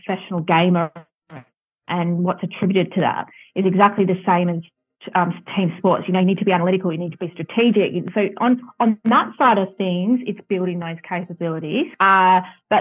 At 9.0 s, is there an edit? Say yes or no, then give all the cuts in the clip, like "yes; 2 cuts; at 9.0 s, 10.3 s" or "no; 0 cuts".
yes; 2 cuts; at 9.0 s, 11.9 s